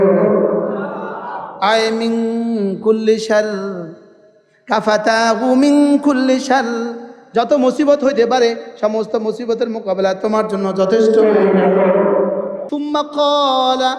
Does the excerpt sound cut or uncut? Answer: cut